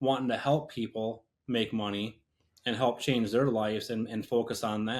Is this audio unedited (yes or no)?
yes